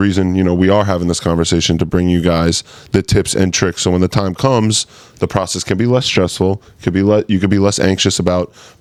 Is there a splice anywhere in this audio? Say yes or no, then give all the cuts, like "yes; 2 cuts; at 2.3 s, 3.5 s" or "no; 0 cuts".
no; 0 cuts